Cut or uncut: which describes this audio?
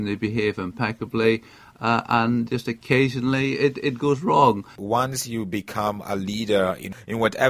cut